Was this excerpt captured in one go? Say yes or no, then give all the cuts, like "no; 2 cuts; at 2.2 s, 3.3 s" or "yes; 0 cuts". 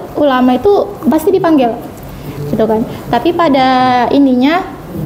yes; 0 cuts